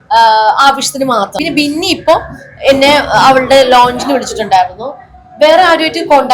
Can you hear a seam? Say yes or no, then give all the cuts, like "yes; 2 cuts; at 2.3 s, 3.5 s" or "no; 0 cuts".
yes; 1 cut; at 1.3 s